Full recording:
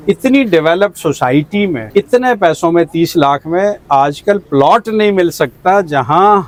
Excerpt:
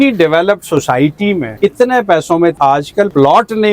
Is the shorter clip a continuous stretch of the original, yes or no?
no